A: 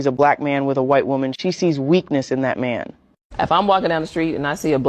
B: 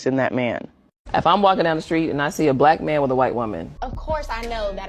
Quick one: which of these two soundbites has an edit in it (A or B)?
B